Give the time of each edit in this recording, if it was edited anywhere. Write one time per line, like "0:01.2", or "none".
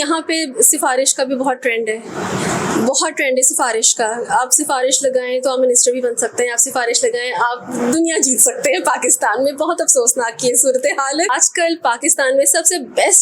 0:11.2